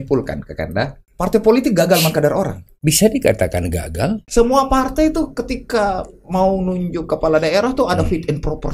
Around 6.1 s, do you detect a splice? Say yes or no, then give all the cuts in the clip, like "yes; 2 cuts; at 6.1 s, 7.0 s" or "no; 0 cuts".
no; 3 cuts; at 1.0 s, 2.6 s, 4.2 s